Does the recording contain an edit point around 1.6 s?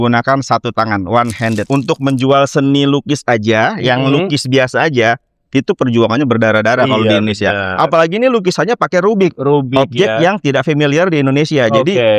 yes; 1 cut; at 1.6 s

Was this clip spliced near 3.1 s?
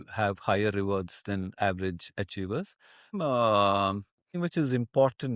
yes; 2 cuts; at 3.1 s, 4.4 s

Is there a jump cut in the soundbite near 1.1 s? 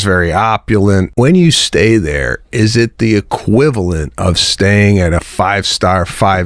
yes; 1 cut; at 1.1 s

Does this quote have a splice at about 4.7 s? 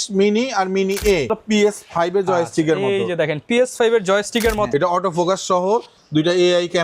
yes; 2 cuts; at 1.4 s, 4.7 s

